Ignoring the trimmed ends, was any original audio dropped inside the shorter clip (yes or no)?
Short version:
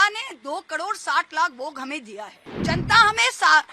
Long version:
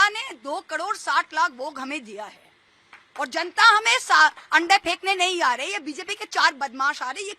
yes